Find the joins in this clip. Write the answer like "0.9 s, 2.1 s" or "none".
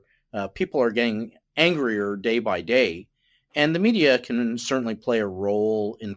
1.4 s